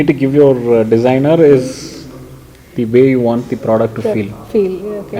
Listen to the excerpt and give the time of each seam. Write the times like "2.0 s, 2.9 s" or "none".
none